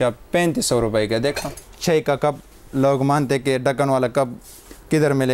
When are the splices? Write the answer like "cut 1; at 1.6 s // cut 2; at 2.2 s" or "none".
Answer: cut 1; at 1.7 s